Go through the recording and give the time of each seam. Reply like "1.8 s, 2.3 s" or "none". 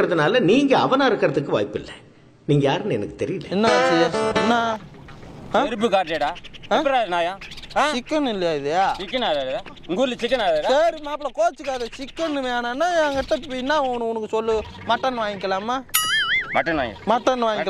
none

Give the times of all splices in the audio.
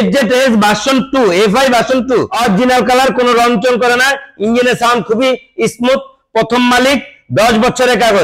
2.3 s

